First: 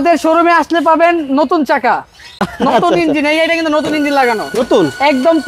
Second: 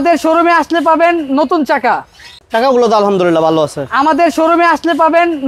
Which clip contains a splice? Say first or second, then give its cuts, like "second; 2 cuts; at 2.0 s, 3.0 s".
second; 1 cut; at 2.4 s